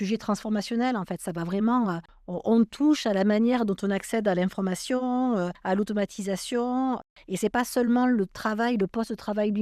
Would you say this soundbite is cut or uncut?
uncut